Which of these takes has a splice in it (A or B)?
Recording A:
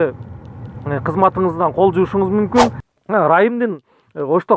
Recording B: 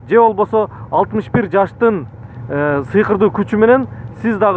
A